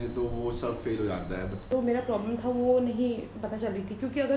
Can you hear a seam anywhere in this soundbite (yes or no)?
yes